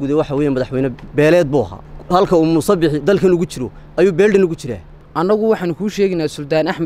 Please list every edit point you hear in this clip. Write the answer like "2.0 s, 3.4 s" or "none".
5.0 s